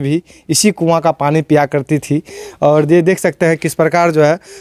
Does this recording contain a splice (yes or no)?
no